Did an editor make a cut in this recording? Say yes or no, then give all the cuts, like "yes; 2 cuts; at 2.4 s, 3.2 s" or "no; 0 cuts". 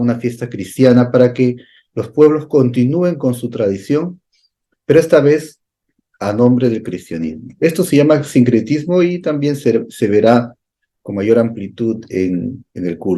no; 0 cuts